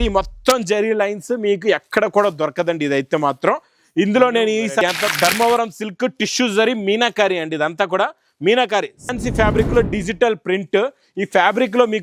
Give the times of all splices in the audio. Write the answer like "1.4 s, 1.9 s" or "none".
4.8 s, 9.0 s

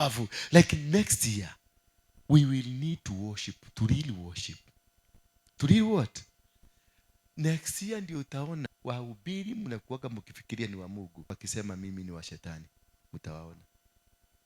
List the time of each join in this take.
8.7 s, 11.4 s

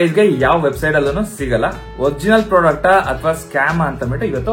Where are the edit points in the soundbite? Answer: 1.8 s

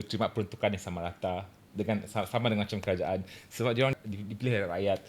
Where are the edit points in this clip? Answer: 3.9 s

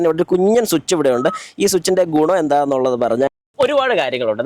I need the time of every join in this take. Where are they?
3.3 s

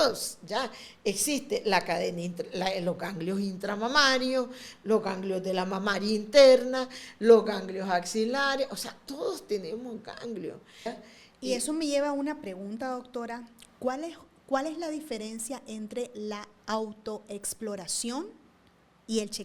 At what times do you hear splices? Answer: 10.8 s

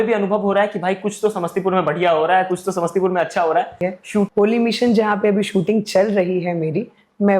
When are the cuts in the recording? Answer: 4.3 s

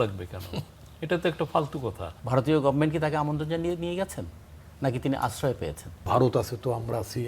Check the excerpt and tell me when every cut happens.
2.1 s, 6.0 s

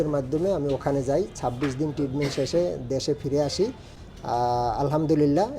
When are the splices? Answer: none

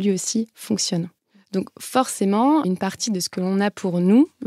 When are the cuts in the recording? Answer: 1.2 s

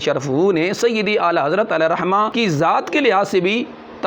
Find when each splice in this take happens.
2.3 s

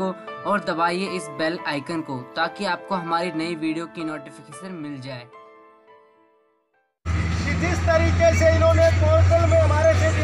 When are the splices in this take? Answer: 6.9 s

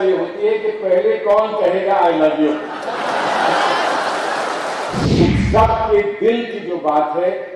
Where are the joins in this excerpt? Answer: 5.0 s

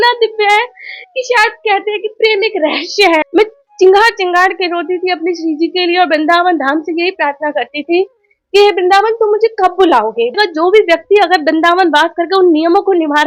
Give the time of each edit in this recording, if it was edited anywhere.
3.3 s, 10.3 s

